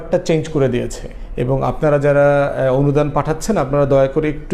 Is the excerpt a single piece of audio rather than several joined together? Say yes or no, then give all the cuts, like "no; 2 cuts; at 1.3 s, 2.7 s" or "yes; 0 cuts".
yes; 0 cuts